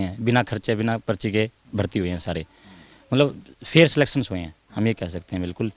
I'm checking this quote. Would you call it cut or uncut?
uncut